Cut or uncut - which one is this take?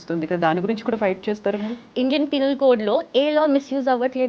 cut